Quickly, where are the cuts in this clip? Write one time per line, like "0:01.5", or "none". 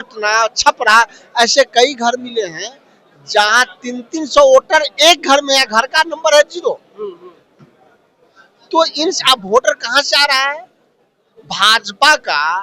none